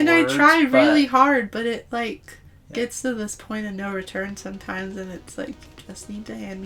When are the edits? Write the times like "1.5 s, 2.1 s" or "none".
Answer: none